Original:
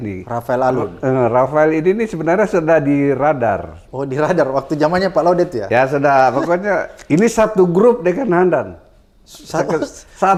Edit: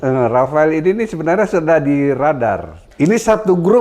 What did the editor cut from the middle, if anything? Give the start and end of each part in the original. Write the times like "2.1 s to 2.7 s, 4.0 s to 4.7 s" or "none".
3.8 s to 6.9 s